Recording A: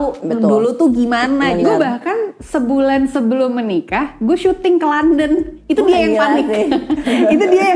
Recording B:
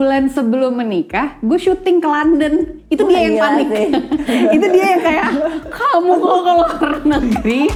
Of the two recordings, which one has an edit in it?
A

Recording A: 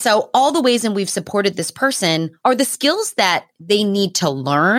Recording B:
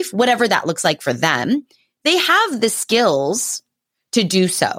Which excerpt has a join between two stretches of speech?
A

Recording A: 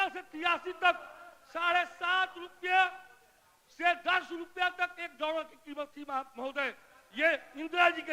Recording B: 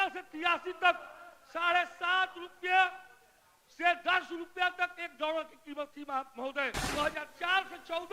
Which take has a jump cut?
B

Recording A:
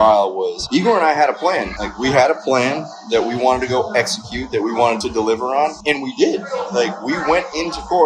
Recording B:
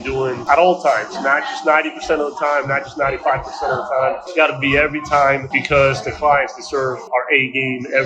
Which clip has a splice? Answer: A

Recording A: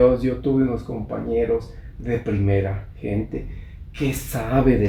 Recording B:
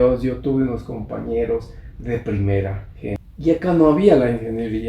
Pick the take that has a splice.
B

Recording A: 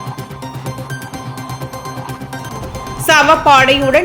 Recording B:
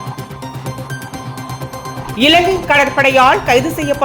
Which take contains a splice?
B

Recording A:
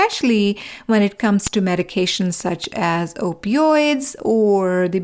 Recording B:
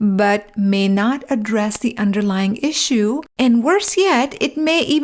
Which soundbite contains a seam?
B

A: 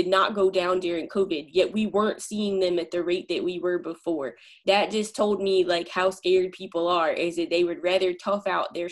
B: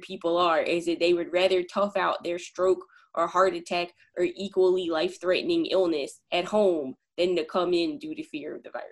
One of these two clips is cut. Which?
A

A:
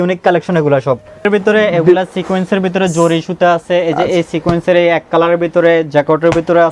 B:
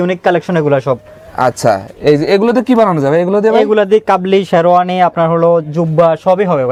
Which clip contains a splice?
A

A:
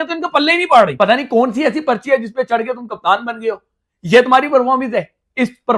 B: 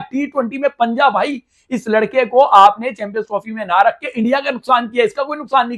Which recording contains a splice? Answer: A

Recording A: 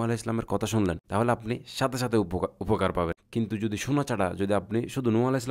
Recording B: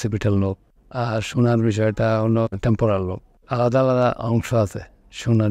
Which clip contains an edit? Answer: A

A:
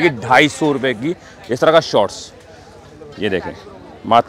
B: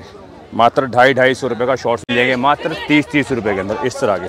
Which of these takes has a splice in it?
B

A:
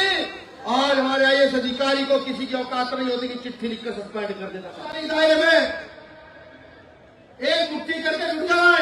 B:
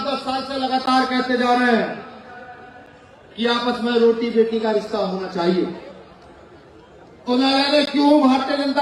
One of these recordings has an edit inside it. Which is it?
A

